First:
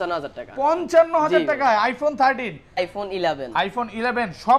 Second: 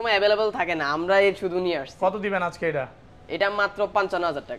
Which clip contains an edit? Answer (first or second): first